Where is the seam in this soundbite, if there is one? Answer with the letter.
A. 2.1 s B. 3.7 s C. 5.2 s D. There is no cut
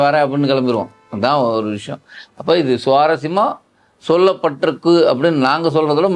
D